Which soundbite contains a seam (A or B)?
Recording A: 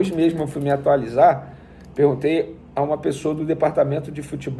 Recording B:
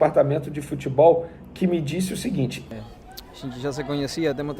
B